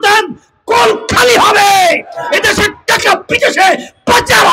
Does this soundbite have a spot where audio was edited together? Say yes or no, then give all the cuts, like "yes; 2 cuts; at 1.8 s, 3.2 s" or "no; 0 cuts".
no; 0 cuts